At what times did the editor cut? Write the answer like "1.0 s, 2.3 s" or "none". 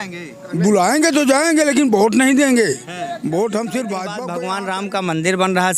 4.2 s